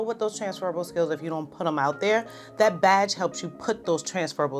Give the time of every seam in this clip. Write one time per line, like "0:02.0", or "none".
none